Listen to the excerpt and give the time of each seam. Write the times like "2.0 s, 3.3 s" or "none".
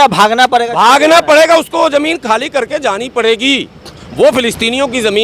none